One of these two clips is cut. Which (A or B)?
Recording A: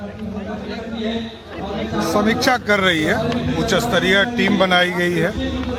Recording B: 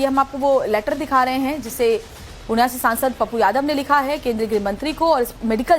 B